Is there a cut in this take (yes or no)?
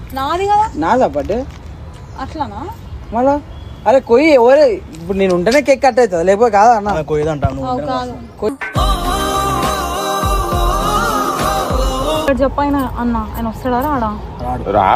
yes